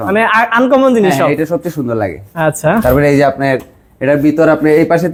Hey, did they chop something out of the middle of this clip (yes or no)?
no